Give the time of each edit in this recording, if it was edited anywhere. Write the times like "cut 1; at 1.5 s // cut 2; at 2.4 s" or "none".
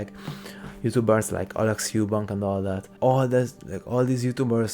cut 1; at 3.0 s